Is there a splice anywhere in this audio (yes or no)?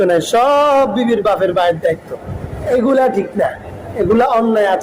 yes